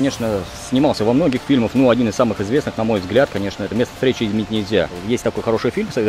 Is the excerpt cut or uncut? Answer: cut